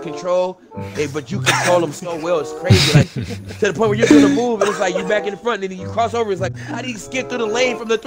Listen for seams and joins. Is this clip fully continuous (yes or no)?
no